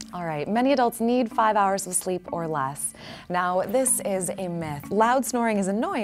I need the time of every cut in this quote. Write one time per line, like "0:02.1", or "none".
0:04.8